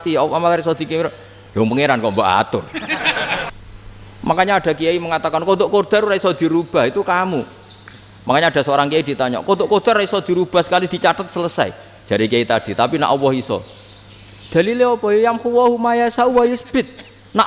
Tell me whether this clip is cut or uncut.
cut